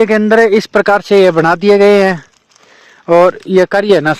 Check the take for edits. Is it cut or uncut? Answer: uncut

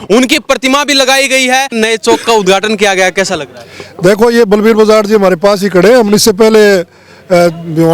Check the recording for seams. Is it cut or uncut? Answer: cut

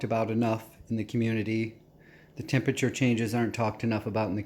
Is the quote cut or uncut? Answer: uncut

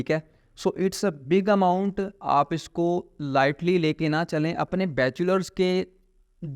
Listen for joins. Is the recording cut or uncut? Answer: cut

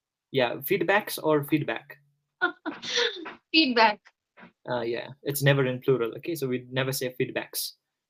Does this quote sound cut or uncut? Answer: uncut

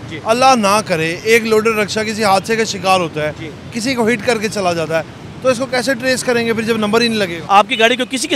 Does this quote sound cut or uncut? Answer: cut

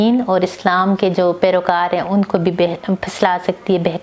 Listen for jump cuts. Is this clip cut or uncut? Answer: uncut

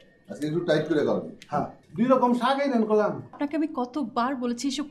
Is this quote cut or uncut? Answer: cut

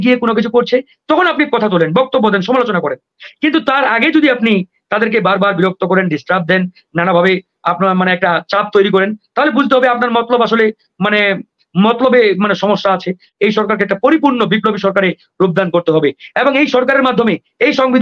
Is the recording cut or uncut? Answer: cut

